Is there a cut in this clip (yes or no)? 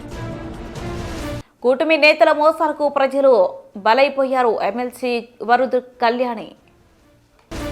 no